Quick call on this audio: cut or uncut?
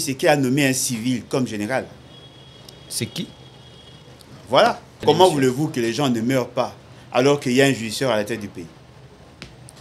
cut